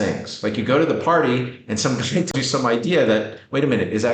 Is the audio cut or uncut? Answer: uncut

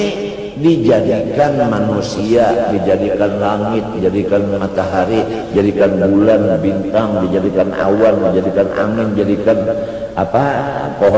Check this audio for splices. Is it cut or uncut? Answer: uncut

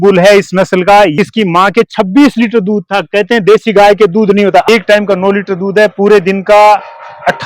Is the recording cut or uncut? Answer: cut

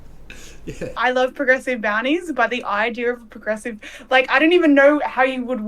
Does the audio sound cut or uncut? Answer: cut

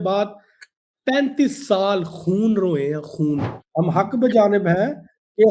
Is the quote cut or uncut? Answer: cut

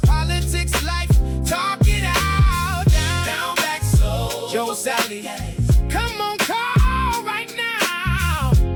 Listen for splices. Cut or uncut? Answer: uncut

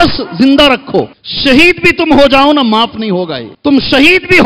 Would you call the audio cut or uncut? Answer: cut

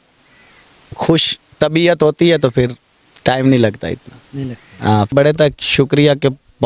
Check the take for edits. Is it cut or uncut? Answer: cut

